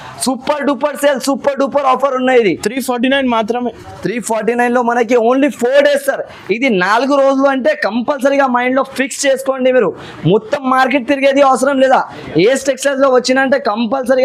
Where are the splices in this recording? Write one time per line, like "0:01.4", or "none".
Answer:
none